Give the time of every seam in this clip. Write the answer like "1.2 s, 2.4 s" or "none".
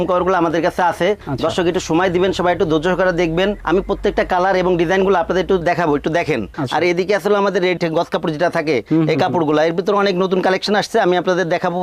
6.5 s